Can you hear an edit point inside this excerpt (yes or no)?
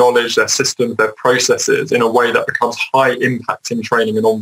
no